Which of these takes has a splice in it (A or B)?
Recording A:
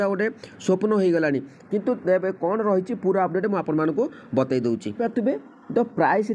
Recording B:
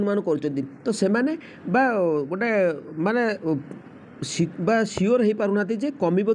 A